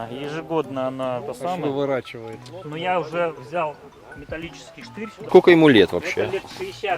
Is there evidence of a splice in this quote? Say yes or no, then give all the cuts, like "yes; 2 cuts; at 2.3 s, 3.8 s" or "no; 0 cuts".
yes; 1 cut; at 5.3 s